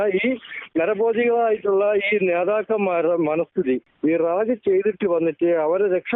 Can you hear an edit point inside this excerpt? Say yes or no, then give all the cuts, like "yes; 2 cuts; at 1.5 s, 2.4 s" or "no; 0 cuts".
yes; 1 cut; at 3.9 s